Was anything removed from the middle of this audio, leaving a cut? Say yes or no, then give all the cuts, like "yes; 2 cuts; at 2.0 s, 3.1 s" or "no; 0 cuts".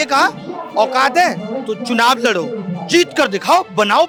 no; 0 cuts